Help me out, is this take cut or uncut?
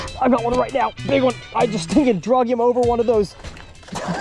cut